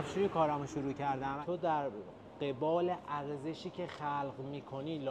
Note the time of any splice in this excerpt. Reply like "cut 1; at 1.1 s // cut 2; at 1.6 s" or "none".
cut 1; at 1.4 s

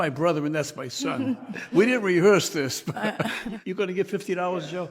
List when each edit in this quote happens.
cut 1; at 3.5 s

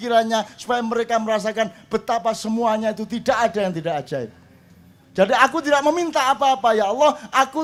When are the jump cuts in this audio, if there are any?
none

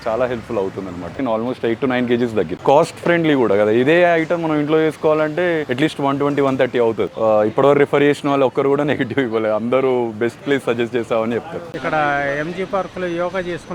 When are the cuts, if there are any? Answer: cut 1; at 1.2 s // cut 2; at 2.6 s // cut 3; at 7.1 s // cut 4; at 11.6 s

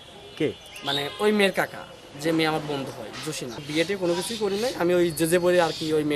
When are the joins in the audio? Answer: cut 1; at 3.6 s

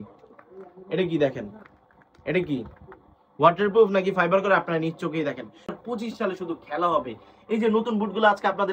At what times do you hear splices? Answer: cut 1; at 5.7 s

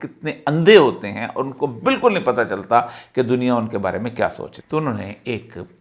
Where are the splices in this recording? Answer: cut 1; at 4.5 s

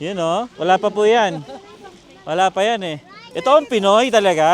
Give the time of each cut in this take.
cut 1; at 3.2 s

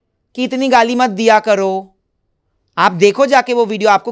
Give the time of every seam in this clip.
none

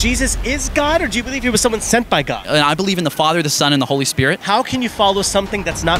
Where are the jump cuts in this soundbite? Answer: cut 1; at 2.6 s // cut 2; at 4.4 s

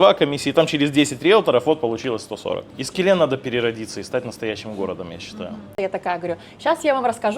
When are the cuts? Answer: cut 1; at 2.8 s // cut 2; at 5.7 s

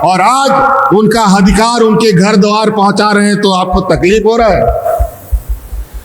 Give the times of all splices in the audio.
none

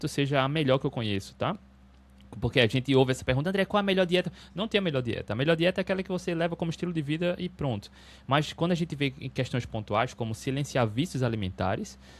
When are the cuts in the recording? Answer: none

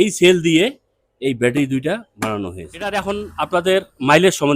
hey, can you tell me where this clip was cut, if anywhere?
cut 1; at 2.9 s

